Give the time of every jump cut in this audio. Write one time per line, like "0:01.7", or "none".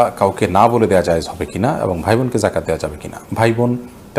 none